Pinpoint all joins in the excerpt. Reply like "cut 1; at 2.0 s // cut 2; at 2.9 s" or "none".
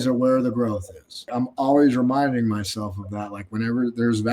cut 1; at 1.3 s

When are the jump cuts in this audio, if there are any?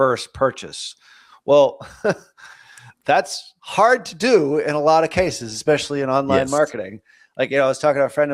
none

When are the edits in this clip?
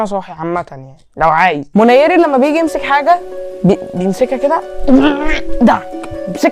cut 1; at 1.7 s

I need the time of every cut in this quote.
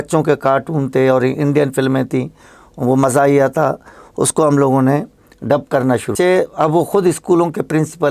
cut 1; at 6.1 s

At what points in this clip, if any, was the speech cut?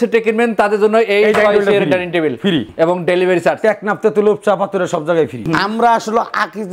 cut 1; at 2.7 s // cut 2; at 5.4 s

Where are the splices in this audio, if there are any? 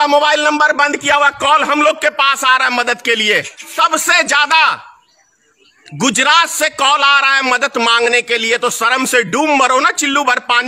cut 1; at 3.7 s

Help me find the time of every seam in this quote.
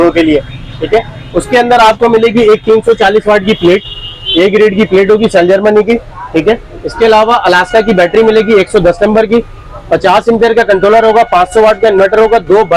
none

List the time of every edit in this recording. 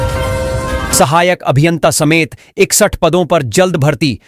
none

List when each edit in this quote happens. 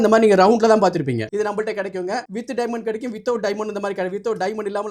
cut 1; at 1.3 s // cut 2; at 2.3 s

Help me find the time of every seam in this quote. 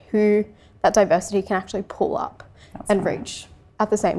none

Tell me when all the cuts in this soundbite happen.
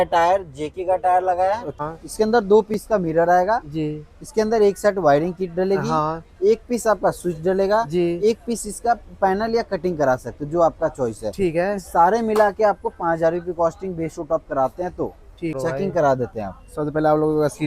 cut 1; at 1.7 s // cut 2; at 15.5 s

